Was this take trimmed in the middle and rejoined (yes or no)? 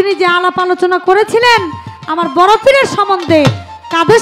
no